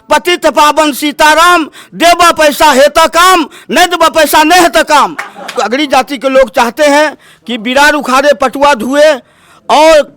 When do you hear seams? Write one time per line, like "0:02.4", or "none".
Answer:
0:05.6